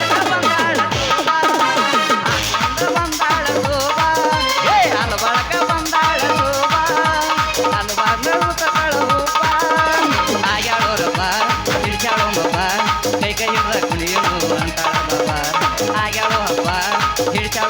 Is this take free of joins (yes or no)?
yes